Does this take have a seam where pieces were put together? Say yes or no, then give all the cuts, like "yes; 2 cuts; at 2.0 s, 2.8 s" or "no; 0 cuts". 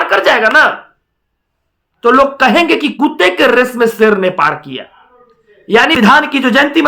yes; 1 cut; at 6.0 s